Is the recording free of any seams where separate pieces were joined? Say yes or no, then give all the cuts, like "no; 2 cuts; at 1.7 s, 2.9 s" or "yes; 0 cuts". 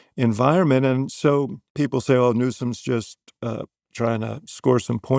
no; 1 cut; at 1.6 s